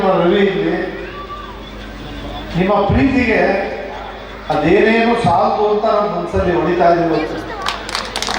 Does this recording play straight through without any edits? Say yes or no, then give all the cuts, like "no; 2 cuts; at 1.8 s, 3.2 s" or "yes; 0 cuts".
yes; 0 cuts